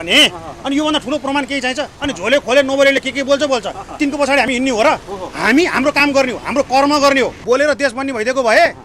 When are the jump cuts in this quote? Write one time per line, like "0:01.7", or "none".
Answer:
0:07.4

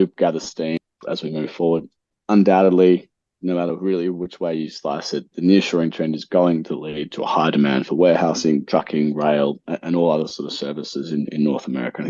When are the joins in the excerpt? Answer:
0:00.8
0:02.1

